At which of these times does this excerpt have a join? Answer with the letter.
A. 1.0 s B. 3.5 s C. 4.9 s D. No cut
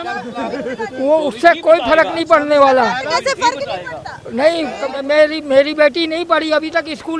C